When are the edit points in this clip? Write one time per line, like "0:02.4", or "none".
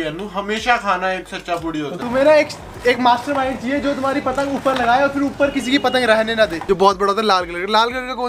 0:02.0
0:06.6